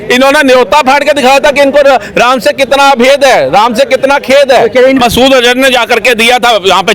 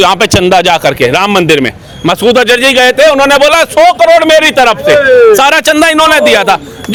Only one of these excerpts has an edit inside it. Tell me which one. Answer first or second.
first